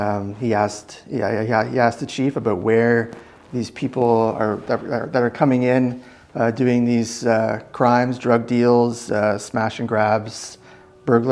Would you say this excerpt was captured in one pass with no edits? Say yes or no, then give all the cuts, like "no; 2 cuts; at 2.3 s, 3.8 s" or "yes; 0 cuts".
yes; 0 cuts